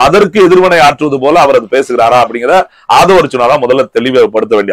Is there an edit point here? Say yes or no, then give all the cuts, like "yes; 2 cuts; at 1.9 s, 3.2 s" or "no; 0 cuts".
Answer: no; 0 cuts